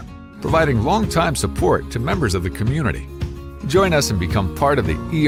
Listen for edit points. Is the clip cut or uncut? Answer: uncut